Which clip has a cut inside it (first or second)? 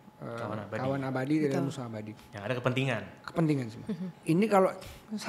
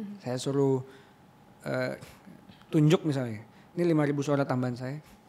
first